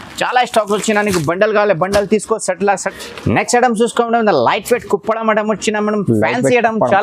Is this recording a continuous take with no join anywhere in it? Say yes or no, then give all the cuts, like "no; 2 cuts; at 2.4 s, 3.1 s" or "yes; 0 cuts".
no; 1 cut; at 3.0 s